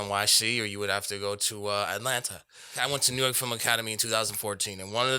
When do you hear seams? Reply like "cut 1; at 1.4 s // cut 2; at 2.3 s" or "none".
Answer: cut 1; at 2.8 s